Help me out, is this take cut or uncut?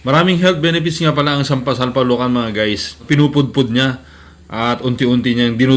cut